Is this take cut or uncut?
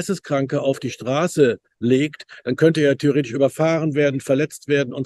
uncut